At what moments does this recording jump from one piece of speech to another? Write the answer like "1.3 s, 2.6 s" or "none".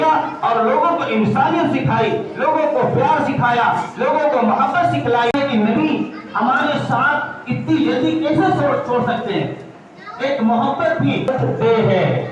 5.3 s, 11.3 s